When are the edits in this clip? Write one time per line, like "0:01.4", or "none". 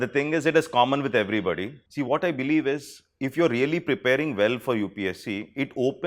0:01.8